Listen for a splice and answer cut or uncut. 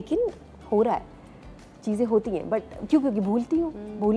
uncut